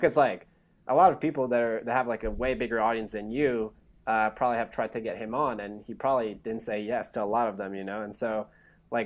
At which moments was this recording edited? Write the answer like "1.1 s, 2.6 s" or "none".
none